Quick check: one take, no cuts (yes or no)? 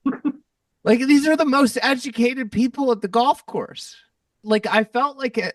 no